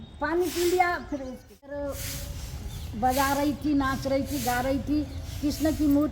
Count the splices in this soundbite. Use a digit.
1